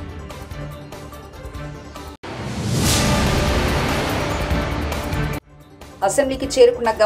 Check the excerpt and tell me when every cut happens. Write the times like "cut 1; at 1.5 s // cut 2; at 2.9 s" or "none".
none